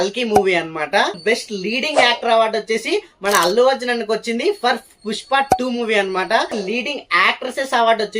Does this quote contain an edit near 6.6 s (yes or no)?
yes